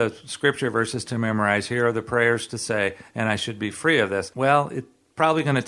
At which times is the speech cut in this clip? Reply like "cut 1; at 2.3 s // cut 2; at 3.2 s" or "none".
cut 1; at 4.3 s